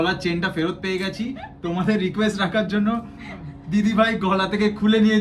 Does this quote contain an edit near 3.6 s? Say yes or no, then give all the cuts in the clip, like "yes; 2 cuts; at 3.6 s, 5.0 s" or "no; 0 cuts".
no; 0 cuts